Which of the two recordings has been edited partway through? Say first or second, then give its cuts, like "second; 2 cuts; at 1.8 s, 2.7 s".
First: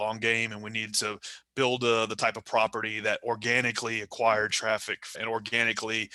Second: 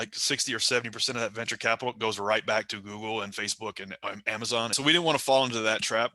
second; 1 cut; at 4.7 s